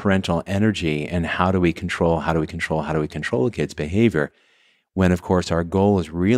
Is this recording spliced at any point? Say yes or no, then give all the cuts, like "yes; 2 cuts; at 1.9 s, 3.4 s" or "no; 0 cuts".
no; 0 cuts